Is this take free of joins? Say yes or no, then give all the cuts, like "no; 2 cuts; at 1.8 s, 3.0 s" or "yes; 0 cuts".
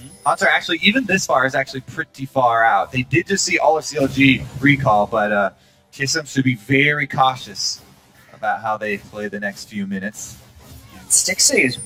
yes; 0 cuts